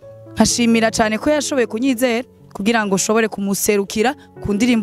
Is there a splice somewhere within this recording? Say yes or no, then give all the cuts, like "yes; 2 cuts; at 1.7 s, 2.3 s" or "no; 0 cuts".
no; 0 cuts